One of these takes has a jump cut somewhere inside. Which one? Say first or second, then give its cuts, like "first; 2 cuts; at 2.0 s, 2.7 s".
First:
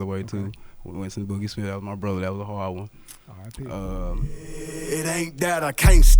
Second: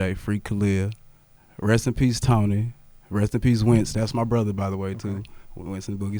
first; 1 cut; at 4.4 s